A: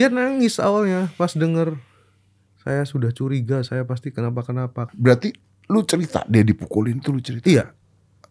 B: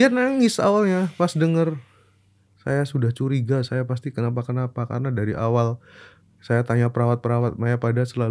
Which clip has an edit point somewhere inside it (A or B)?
A